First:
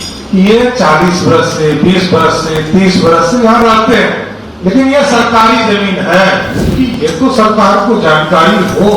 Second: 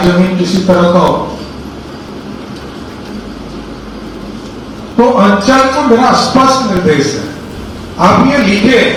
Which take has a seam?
first; 1 cut; at 6.7 s

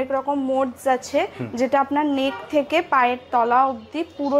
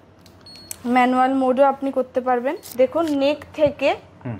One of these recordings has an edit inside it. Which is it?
second; 1 cut; at 2.6 s

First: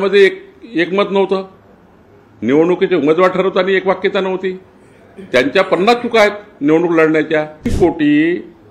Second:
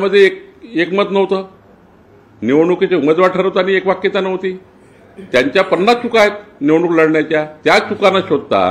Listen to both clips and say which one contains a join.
first; 1 cut; at 7.6 s

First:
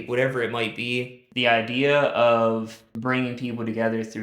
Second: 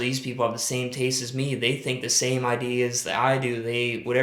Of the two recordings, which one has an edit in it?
first; 2 cuts; at 1.2 s, 2.8 s

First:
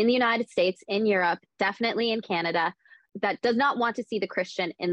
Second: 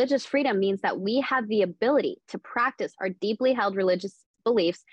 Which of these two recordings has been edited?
first; 1 cut; at 3.0 s

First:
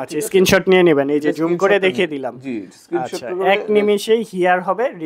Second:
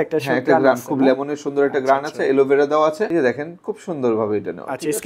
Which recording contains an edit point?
second; 1 cut; at 3.1 s

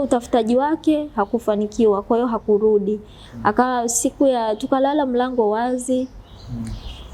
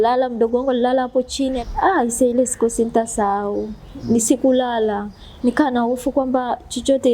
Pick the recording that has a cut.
second; 1 cut; at 1.6 s

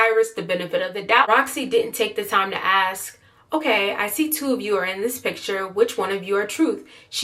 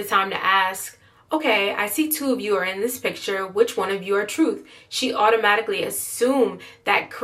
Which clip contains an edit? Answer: first; 1 cut; at 1.3 s

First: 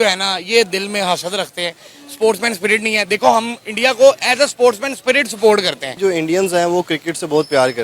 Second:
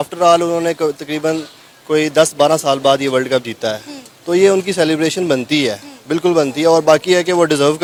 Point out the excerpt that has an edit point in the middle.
first; 1 cut; at 6.0 s

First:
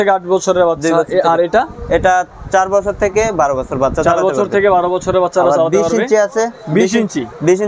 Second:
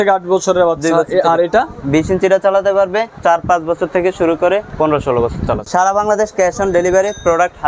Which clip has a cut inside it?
second; 4 cuts; at 1.8 s, 3.2 s, 4.7 s, 5.6 s

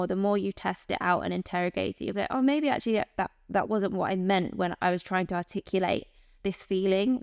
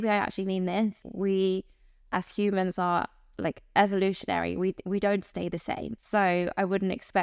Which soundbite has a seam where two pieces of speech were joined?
second; 2 cuts; at 1.0 s, 5.9 s

